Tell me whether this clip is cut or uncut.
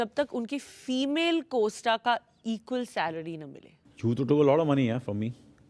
cut